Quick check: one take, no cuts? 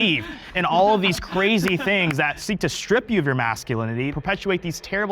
no; 2 cuts; at 2.4 s, 4.1 s

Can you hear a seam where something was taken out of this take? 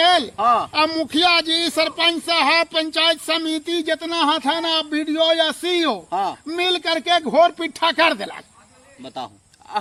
no; 0 cuts

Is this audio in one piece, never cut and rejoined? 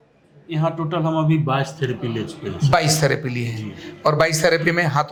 yes; 0 cuts

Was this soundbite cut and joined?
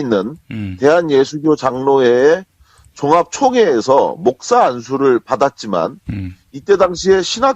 yes; 1 cut; at 6.4 s

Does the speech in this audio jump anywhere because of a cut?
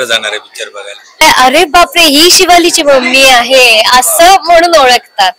yes; 1 cut; at 1.2 s

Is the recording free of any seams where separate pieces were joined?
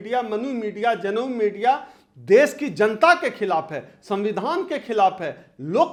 yes; 0 cuts

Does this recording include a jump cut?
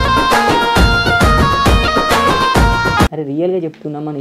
yes; 1 cut; at 3.1 s

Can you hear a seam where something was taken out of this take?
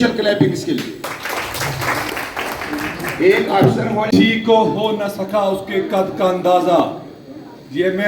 yes; 1 cut; at 4.3 s

